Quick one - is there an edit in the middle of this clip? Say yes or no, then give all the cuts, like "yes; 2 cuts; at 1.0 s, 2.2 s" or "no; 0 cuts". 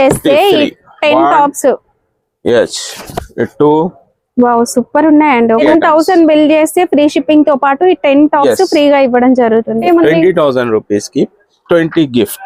yes; 2 cuts; at 5.7 s, 9.8 s